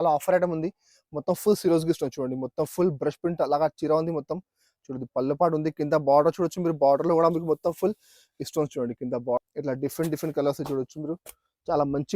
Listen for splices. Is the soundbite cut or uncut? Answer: cut